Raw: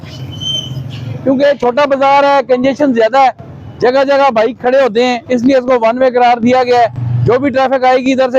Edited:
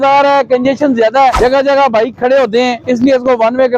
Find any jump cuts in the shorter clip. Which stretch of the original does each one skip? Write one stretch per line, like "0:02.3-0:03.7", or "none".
0:03.3-0:03.8

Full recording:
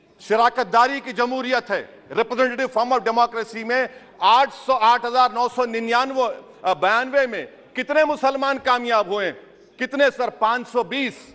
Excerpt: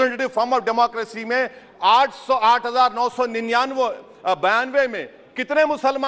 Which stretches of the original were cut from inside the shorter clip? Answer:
none

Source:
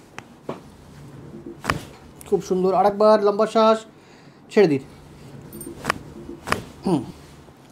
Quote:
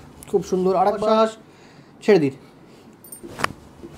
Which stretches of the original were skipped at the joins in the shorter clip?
0:03.0-0:03.5

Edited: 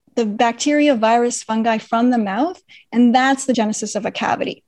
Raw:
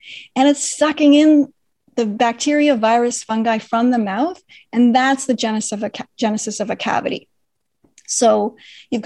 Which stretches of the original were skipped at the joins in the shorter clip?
0:05.4-0:06.2

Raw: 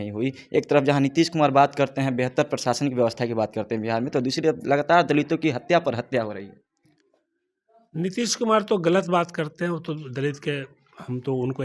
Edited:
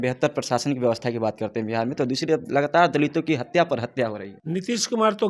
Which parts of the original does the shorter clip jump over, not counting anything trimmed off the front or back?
0:06.5-0:07.8

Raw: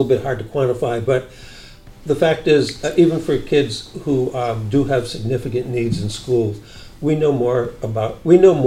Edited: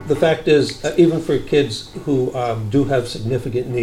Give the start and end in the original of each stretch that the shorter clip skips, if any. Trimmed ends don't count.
none

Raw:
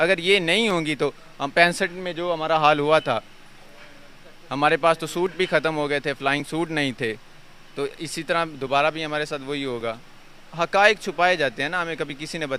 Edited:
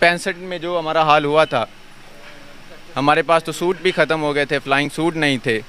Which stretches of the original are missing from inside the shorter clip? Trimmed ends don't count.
none

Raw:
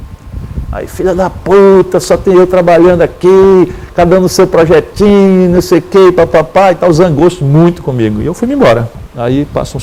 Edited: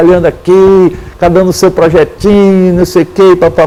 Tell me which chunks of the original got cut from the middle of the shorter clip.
none

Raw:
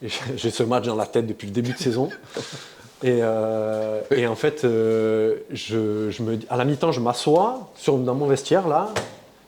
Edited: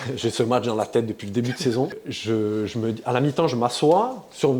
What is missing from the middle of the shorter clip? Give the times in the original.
0:02.3-0:05.5

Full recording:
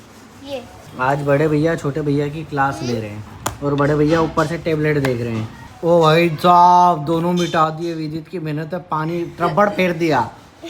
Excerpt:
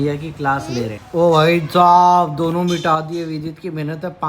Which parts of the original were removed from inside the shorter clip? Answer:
0:03.1-0:05.7

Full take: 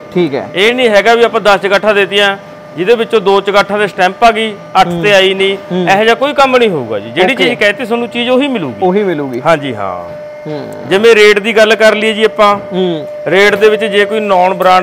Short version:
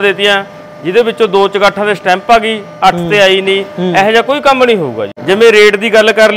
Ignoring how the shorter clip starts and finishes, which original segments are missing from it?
0:07.0-0:10.7

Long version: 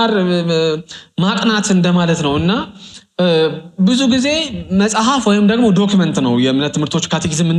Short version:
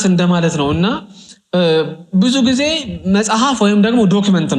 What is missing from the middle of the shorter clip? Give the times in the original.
none

